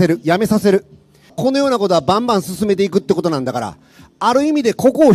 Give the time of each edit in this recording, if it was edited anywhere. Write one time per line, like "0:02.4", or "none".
0:01.3